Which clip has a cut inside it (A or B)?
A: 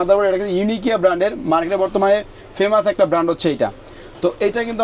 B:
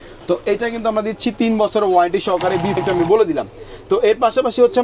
B